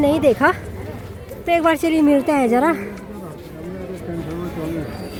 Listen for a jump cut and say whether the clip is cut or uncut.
uncut